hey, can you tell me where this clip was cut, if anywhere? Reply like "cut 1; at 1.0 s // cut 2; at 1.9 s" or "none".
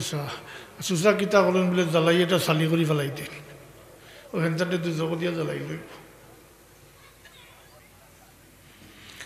cut 1; at 7.8 s